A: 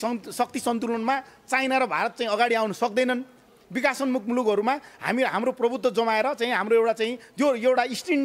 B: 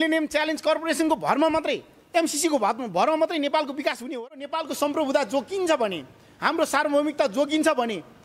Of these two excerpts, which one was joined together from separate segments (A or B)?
B